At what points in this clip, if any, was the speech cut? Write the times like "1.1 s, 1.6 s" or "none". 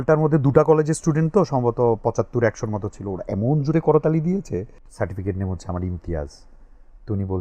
4.8 s